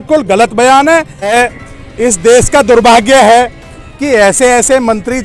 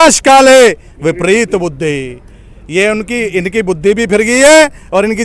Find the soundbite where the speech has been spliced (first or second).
first